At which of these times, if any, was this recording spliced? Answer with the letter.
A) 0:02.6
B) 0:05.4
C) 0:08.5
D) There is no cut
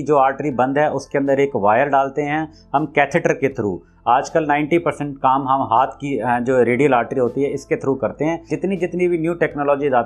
C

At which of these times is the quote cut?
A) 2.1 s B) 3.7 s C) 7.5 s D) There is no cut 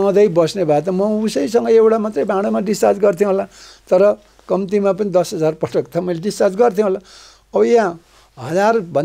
D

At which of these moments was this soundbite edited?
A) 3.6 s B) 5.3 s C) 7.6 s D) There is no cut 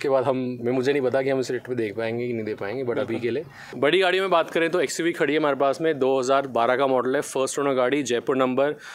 A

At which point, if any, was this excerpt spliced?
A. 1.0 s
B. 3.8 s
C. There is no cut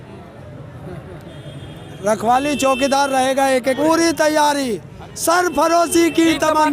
B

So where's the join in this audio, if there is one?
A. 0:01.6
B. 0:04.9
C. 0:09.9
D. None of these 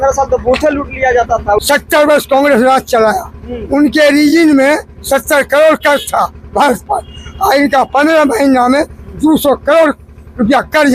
A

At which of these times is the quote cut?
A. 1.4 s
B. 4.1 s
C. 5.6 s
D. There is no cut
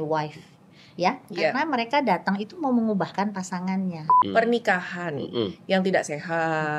B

